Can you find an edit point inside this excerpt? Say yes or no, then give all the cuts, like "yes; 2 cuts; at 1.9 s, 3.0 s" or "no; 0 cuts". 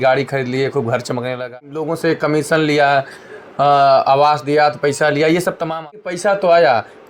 yes; 2 cuts; at 1.5 s, 5.7 s